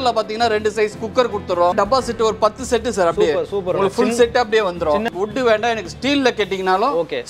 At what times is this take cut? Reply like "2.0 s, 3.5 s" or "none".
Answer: 1.7 s, 5.1 s